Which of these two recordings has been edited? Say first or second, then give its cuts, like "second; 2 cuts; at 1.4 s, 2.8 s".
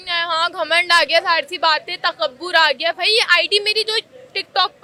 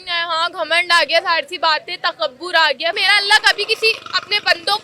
second; 1 cut; at 3.0 s